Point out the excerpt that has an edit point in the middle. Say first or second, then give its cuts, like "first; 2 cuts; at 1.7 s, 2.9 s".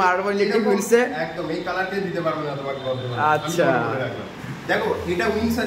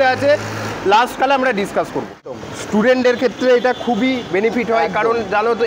second; 1 cut; at 2.3 s